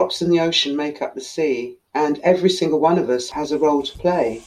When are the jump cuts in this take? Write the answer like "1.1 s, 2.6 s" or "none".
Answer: 1.8 s, 3.3 s